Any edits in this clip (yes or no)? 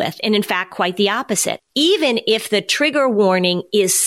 no